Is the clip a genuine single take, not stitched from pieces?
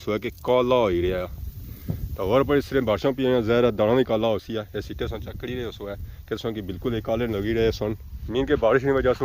yes; 0 cuts

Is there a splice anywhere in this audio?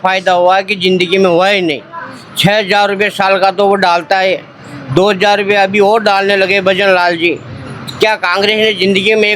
no; 0 cuts

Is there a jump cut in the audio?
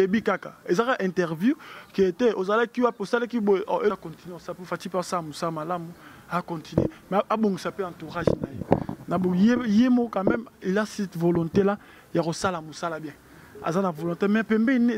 yes; 1 cut; at 3.9 s

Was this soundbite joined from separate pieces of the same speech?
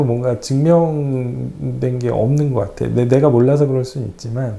no; 0 cuts

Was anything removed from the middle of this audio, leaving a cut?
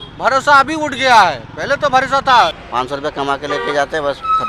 yes; 1 cut; at 2.6 s

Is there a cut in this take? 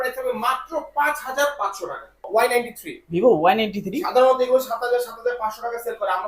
yes; 1 cut; at 2.2 s

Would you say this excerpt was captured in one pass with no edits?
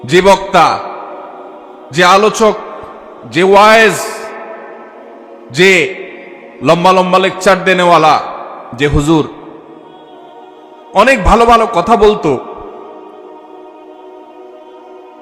yes; 0 cuts

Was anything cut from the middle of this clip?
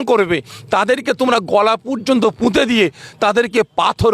no; 0 cuts

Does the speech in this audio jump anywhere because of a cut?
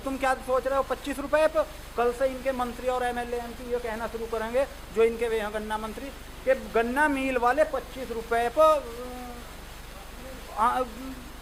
no; 0 cuts

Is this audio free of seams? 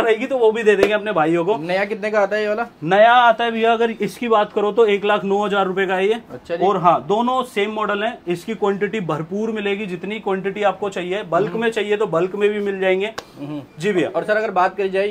yes; 0 cuts

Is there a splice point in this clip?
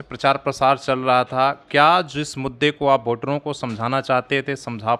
no; 0 cuts

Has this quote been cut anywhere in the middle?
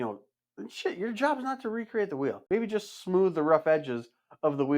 yes; 1 cut; at 2.4 s

